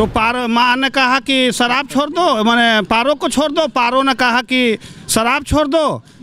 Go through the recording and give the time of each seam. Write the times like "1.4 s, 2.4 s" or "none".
none